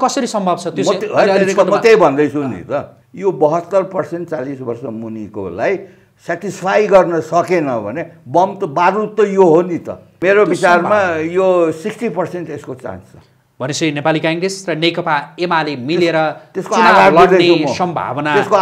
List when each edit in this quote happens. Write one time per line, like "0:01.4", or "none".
0:03.0
0:10.1